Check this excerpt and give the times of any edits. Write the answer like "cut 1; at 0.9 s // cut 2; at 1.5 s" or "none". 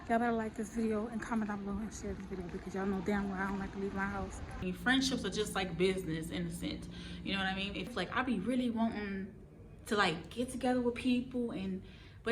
cut 1; at 4.6 s // cut 2; at 7.9 s